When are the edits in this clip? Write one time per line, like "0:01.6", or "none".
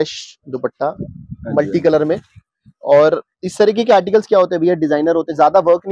none